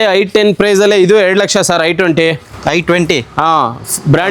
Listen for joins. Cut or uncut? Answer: uncut